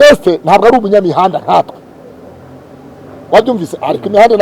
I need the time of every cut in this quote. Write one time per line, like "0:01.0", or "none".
none